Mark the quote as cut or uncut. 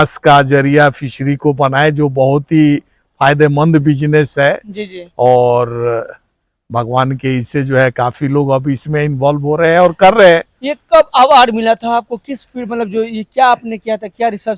uncut